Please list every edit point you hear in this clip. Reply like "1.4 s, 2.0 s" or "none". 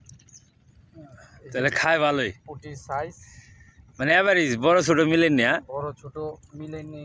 none